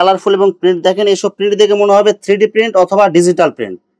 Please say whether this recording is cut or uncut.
uncut